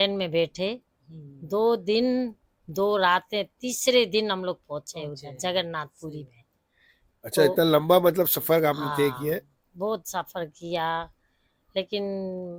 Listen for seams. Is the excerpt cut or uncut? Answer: uncut